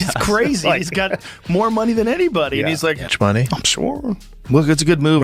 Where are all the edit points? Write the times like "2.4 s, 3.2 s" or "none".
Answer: 3.0 s